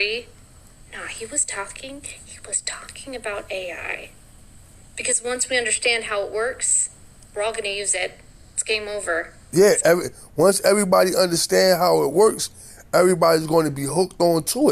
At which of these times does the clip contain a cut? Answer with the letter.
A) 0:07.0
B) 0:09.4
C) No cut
C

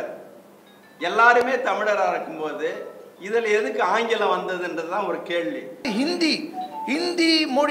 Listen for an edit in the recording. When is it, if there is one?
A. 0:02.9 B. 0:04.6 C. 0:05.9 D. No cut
C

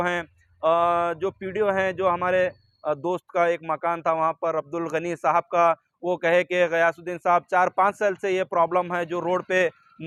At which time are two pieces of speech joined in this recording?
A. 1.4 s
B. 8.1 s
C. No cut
C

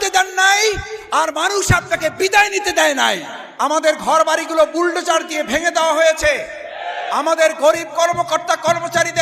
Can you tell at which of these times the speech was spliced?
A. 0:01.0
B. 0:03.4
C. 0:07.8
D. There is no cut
B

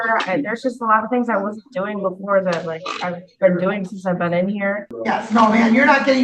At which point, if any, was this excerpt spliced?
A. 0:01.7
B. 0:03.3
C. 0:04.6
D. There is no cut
C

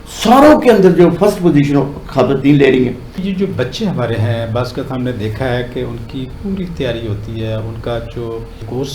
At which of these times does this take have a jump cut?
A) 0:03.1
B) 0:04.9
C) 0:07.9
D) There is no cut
A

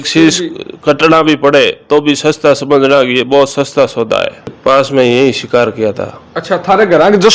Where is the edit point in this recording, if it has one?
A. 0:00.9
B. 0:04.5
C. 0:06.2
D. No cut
B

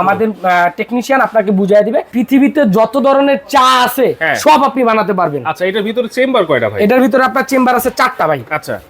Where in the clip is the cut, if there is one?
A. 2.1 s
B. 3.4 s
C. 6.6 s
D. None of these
A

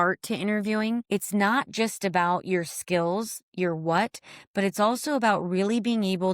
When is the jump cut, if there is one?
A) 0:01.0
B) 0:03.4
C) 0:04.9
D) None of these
A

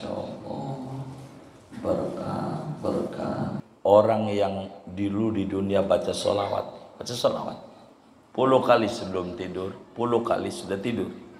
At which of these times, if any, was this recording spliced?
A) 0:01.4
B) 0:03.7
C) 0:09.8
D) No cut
B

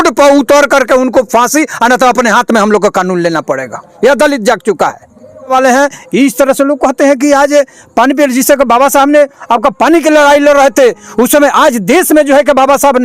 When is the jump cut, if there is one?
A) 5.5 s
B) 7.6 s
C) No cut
A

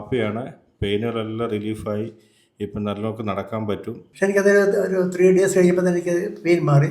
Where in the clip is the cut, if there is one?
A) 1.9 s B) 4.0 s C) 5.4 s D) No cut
B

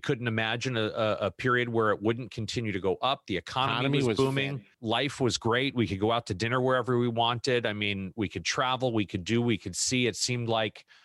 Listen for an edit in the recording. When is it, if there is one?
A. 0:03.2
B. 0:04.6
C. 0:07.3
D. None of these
B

